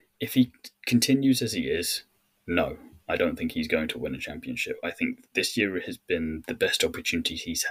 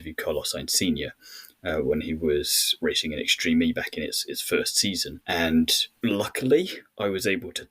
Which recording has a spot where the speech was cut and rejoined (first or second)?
second